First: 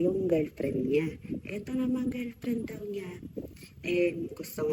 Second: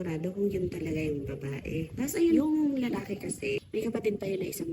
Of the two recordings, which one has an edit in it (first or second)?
second